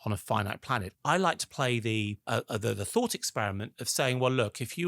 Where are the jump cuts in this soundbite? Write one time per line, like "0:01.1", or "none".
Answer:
0:00.9
0:02.2